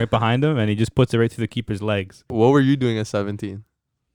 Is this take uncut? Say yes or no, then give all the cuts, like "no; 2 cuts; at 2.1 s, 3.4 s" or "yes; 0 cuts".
no; 1 cut; at 2.3 s